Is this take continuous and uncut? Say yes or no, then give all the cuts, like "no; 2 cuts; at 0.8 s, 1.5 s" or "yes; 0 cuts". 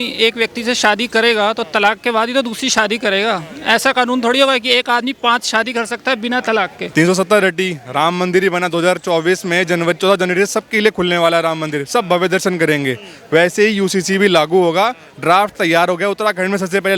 no; 1 cut; at 6.8 s